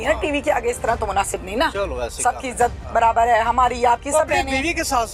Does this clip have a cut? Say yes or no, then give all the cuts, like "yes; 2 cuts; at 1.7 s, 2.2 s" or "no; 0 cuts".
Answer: no; 0 cuts